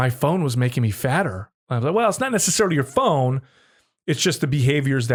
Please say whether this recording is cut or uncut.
uncut